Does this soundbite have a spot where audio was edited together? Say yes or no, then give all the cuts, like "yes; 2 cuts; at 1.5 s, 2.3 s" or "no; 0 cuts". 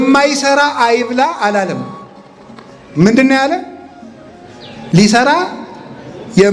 no; 0 cuts